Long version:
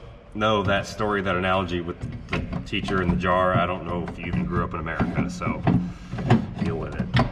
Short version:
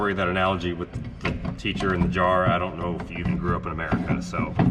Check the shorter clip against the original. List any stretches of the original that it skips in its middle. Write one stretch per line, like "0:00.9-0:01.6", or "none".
none